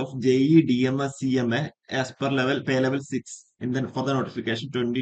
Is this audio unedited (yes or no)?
yes